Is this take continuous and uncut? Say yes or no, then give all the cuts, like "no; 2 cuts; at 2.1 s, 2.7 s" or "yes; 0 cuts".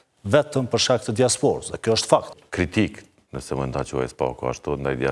no; 1 cut; at 2.4 s